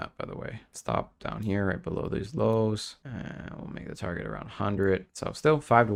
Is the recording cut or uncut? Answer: uncut